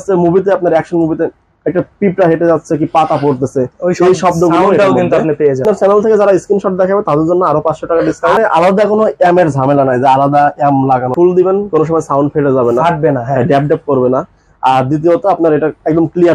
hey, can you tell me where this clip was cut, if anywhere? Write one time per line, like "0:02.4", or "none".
0:05.6
0:08.4
0:11.1